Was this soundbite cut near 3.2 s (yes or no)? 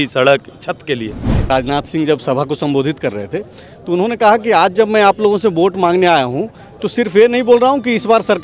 no